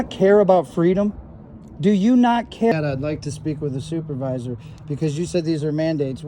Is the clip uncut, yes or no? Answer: no